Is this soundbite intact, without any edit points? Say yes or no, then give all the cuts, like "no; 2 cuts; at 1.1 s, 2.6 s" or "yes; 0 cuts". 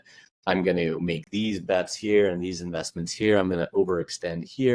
yes; 0 cuts